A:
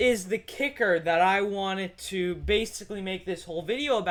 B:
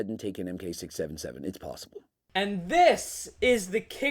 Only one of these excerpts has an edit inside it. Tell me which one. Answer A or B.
B